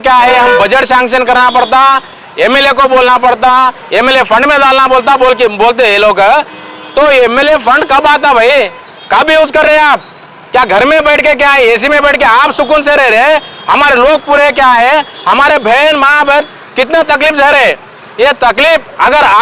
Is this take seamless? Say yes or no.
yes